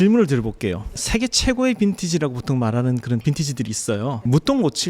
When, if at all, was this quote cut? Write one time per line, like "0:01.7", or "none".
0:00.9